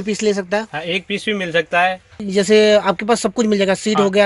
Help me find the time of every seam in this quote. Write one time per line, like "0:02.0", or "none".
0:02.2